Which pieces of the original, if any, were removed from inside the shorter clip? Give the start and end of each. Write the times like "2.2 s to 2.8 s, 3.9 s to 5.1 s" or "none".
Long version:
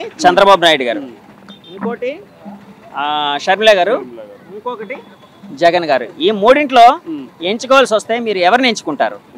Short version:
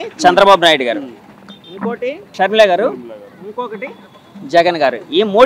2.3 s to 3.4 s